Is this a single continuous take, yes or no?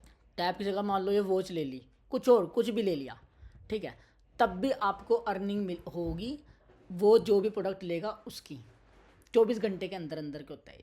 yes